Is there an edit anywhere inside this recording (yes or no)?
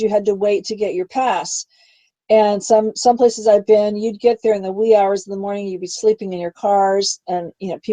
yes